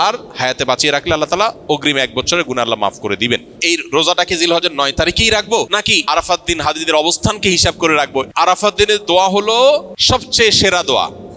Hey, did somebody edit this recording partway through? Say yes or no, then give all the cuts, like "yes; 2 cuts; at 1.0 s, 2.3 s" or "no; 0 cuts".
yes; 4 cuts; at 3.6 s, 6.0 s, 8.3 s, 9.9 s